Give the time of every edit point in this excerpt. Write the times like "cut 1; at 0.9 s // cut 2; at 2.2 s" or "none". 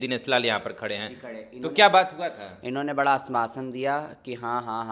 none